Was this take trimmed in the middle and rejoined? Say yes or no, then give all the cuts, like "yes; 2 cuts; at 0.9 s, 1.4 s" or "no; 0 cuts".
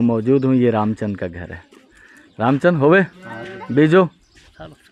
no; 0 cuts